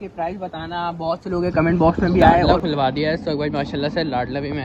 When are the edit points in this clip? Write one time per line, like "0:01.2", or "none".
0:02.5

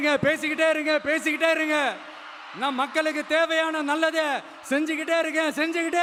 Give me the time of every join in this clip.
none

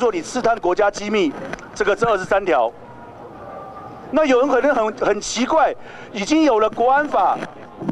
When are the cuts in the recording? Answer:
none

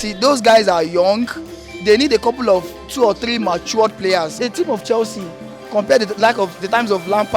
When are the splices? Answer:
0:04.3

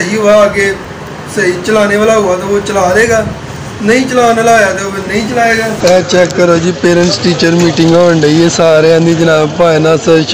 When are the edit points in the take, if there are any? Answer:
0:05.7

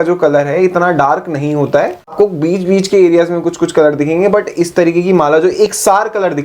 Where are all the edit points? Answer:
0:02.1

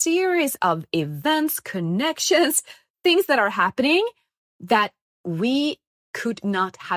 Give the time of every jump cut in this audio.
none

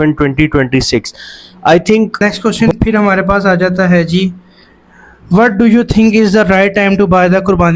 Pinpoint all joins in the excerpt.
0:02.2

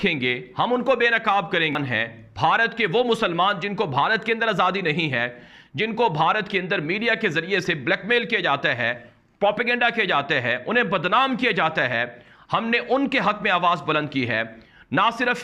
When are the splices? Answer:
none

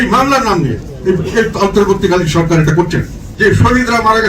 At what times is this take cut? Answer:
0:03.2

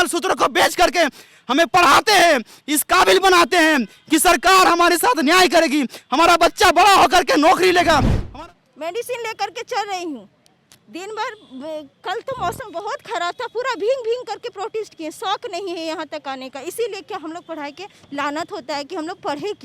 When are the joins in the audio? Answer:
0:08.2

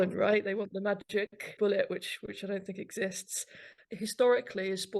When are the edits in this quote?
0:01.5

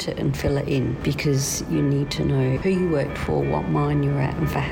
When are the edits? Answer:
0:01.0
0:02.6

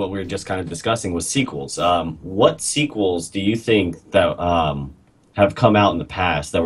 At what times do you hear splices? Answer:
0:05.6

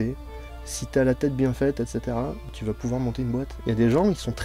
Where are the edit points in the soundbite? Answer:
0:02.4
0:03.5

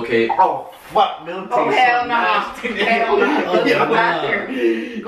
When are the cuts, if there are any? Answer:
0:01.8
0:02.6

